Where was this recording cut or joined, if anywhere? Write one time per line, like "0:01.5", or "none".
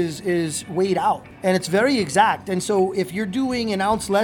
0:01.3